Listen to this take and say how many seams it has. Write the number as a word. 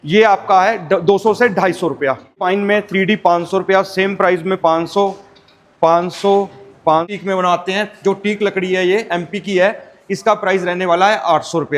two